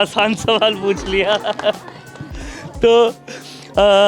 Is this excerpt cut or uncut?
uncut